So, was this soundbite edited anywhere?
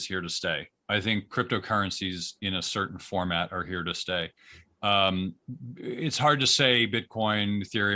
no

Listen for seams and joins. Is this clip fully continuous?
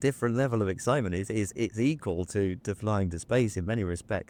yes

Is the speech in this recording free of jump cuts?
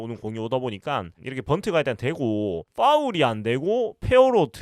no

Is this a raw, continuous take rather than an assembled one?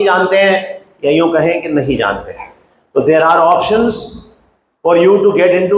yes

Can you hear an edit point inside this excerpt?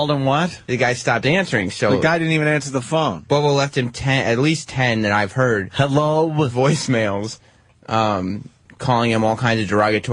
no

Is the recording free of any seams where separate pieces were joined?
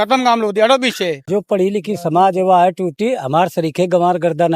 no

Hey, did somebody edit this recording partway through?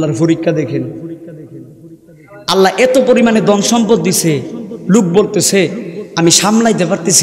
no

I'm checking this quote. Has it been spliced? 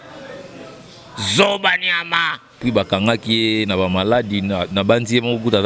yes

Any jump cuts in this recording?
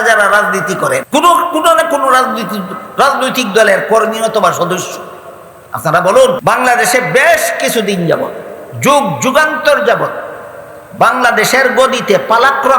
yes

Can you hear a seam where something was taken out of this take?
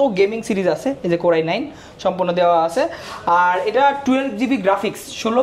no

